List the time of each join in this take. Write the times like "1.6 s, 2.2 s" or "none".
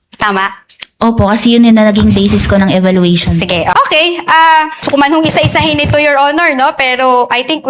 3.7 s, 4.8 s